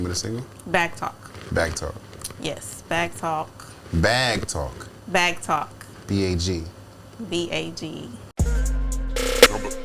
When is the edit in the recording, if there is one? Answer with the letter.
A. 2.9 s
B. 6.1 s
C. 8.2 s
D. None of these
C